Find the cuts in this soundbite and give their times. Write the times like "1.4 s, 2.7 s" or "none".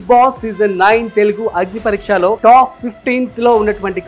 2.4 s